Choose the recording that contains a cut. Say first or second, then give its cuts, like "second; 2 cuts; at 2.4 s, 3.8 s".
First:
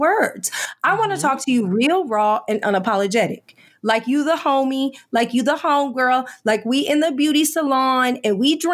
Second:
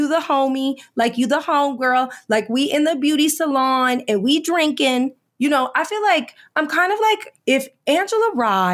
second; 1 cut; at 7.3 s